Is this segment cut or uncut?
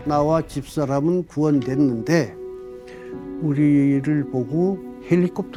uncut